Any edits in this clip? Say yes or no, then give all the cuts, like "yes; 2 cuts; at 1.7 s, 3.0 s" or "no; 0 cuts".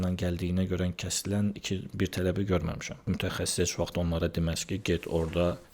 yes; 1 cut; at 3.1 s